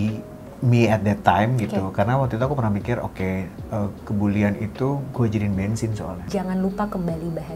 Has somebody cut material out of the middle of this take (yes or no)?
yes